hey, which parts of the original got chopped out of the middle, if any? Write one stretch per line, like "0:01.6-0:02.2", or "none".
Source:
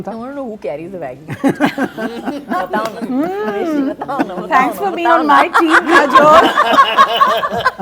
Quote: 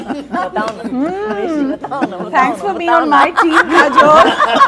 none